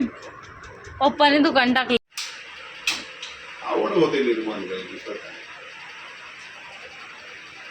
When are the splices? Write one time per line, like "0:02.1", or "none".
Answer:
0:02.0